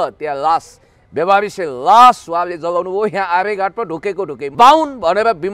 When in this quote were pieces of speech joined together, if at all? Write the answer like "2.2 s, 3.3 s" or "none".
4.4 s